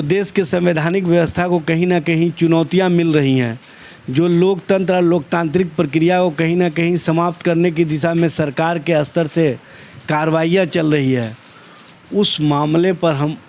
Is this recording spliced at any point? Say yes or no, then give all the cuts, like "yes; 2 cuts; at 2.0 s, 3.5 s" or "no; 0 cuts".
no; 0 cuts